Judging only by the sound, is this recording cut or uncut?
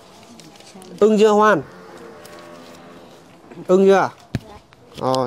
uncut